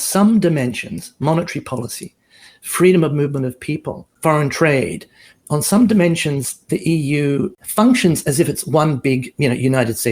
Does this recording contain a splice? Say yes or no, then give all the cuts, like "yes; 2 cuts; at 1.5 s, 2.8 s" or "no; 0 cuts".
yes; 2 cuts; at 4.1 s, 7.6 s